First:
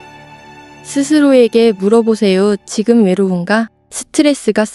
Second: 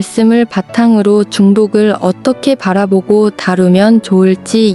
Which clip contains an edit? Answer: first; 1 cut; at 0.9 s

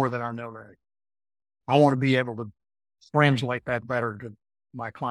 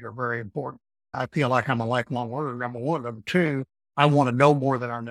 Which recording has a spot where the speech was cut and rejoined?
second; 2 cuts; at 1.1 s, 3.8 s

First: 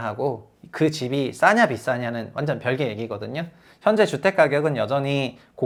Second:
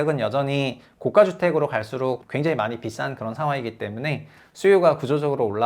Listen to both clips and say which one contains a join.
second; 1 cut; at 2.2 s

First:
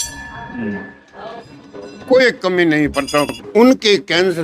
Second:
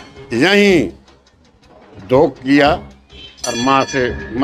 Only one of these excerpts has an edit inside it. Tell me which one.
first; 1 cut; at 3.3 s

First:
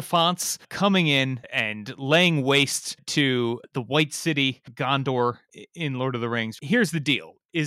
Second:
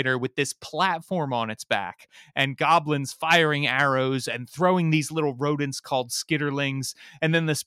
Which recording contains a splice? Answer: first; 2 cuts; at 1.5 s, 5.5 s

